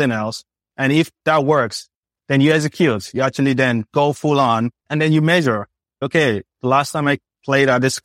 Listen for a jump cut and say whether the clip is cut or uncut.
cut